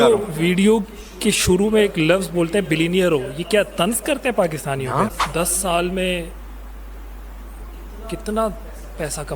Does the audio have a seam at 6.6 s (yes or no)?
no